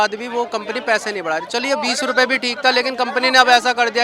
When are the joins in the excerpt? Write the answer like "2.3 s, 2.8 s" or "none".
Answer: none